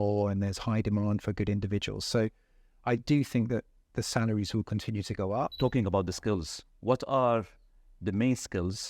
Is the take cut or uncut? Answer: cut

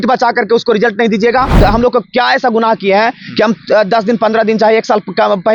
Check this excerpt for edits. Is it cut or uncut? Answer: cut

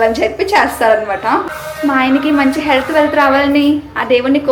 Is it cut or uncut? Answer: cut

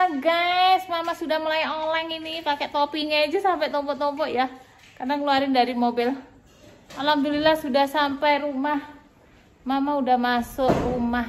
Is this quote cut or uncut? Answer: uncut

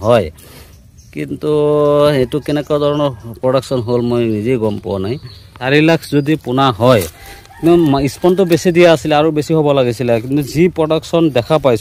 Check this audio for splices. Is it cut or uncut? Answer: cut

